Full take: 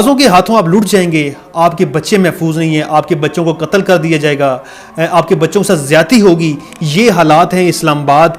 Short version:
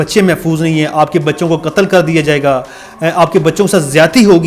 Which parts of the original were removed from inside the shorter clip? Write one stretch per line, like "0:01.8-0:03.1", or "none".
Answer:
none

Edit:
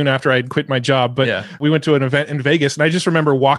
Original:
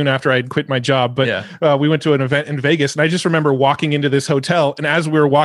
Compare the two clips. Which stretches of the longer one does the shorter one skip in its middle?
0:01.6-0:01.8

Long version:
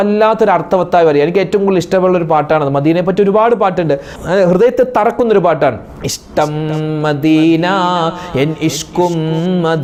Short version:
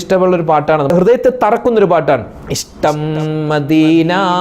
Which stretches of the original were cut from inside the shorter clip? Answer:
0:02.7-0:04.4

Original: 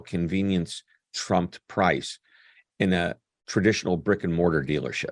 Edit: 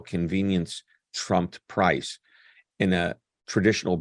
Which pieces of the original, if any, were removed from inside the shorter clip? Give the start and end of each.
none

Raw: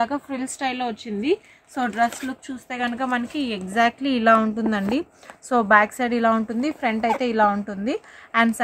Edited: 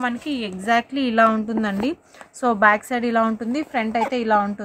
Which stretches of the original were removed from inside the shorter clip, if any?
none

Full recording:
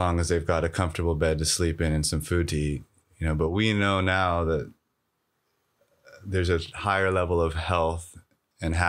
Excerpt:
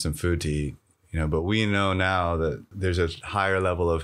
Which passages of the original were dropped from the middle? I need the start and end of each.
0:04.7-0:06.2

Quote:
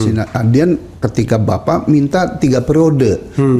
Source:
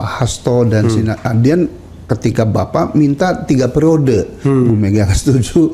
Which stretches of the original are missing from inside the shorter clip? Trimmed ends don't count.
0:01.9-0:02.0

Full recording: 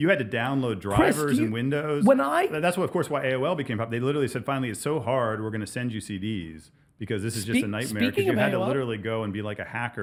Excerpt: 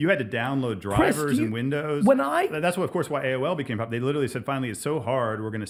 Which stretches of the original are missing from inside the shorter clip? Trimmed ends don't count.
none

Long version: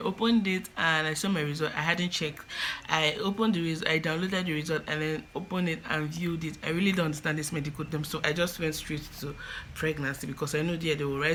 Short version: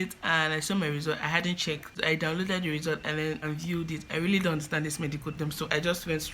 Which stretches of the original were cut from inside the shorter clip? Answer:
0:02.5-0:03.8
0:05.3-0:06.0

